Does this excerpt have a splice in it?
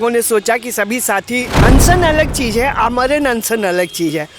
yes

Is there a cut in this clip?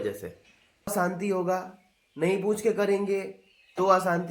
yes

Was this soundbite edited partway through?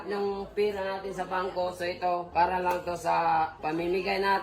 yes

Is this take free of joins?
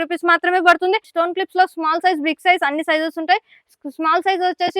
no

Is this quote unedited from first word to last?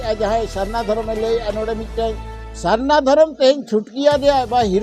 yes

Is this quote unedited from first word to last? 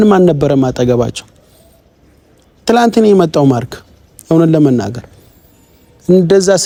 yes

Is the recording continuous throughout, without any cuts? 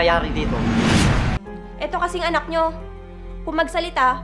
no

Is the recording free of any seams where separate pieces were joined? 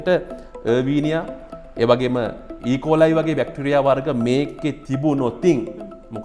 yes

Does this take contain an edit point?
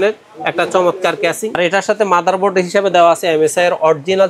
yes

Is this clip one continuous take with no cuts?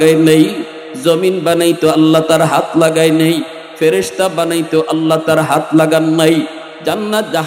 yes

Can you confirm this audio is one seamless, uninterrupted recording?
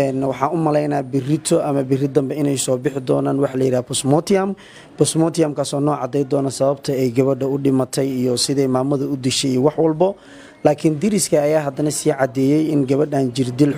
yes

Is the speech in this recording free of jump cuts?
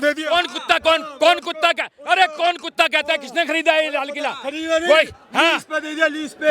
yes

